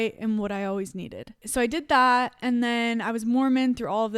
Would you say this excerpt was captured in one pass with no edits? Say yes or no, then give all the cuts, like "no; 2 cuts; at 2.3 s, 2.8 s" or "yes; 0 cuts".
yes; 0 cuts